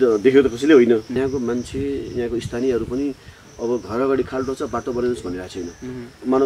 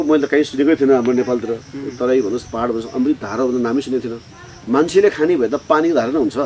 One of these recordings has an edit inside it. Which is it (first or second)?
first